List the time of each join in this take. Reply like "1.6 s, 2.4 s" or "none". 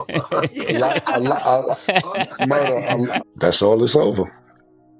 3.2 s